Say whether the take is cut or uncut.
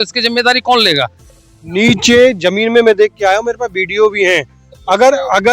cut